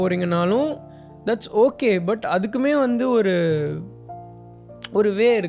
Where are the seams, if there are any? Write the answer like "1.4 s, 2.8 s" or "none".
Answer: none